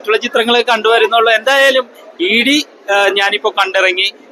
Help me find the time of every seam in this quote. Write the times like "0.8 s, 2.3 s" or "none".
none